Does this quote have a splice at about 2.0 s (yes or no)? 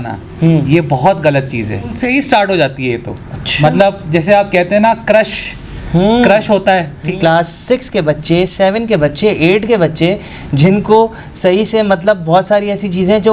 yes